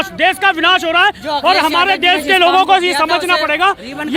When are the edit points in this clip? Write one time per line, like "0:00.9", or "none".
none

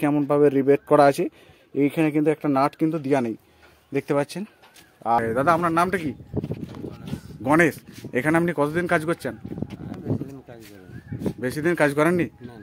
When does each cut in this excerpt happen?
0:05.2

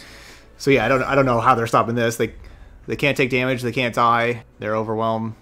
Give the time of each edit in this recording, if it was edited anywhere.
0:04.5

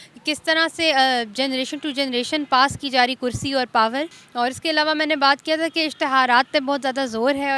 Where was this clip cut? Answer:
0:04.2

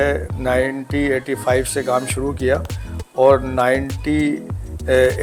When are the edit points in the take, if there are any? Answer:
none

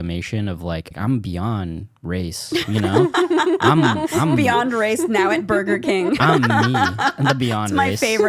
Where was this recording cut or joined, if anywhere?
0:00.9

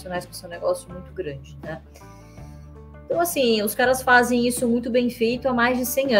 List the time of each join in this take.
none

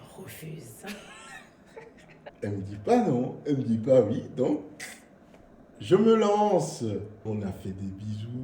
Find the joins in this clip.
0:02.2
0:07.3

